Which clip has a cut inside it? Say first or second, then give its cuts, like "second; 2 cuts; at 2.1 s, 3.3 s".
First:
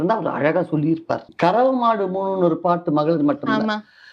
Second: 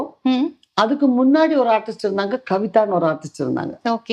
first; 1 cut; at 1.3 s